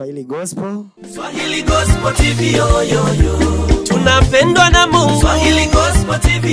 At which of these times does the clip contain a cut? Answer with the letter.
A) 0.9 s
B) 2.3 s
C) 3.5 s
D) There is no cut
A